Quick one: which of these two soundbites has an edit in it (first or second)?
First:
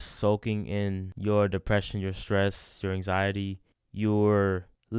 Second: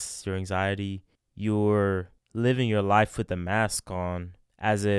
first